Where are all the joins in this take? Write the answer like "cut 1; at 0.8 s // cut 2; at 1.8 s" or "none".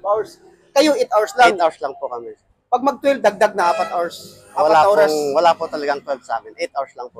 none